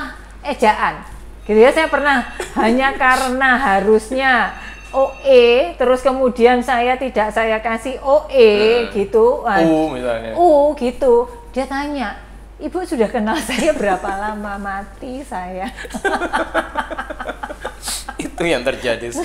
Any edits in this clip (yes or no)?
no